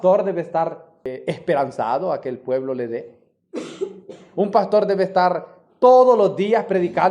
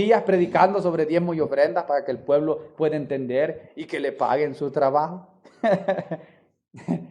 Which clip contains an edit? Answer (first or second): first